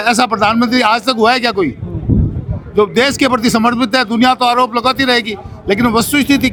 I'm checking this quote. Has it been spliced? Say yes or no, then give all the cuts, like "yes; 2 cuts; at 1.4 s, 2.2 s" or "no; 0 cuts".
no; 0 cuts